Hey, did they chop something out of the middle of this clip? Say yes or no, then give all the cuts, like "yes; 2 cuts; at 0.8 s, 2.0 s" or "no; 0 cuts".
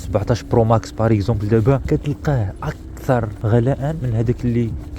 yes; 2 cuts; at 1.8 s, 3.8 s